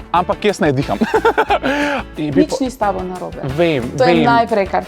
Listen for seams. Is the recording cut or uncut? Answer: cut